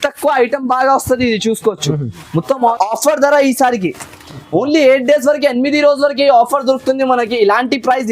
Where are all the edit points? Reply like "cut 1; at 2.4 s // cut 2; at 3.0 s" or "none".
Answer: cut 1; at 2.7 s